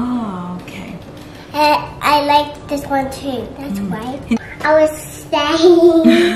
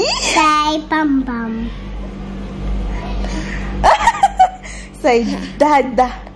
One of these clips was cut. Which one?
first; 1 cut; at 4.4 s

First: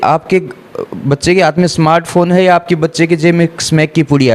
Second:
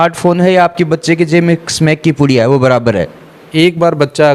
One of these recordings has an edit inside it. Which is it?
second; 1 cut; at 3.4 s

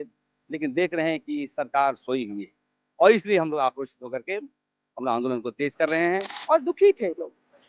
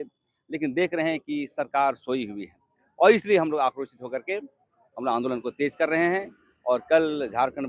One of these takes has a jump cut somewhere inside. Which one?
first; 1 cut; at 6.3 s

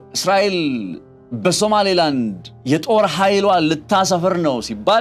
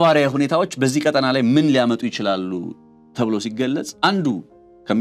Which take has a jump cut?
second; 1 cut; at 3.9 s

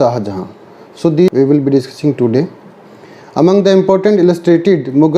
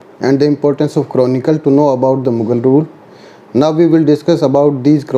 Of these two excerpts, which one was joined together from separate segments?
first; 1 cut; at 1.3 s

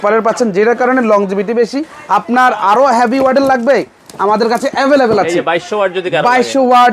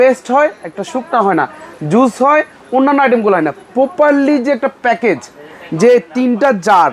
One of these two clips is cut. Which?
first; 1 cut; at 1.9 s

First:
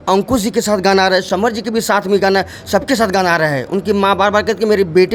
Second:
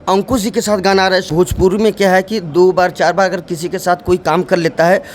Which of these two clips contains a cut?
second; 1 cut; at 1.3 s

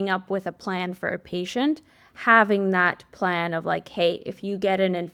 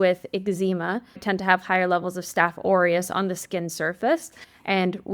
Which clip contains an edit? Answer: second; 1 cut; at 1.2 s

